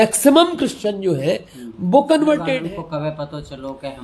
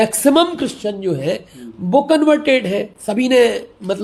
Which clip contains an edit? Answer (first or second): first